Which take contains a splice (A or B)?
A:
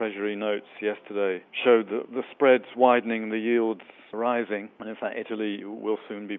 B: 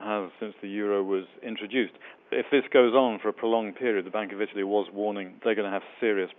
B